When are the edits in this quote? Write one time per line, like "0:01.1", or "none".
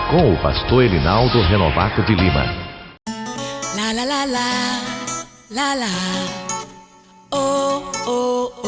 0:02.8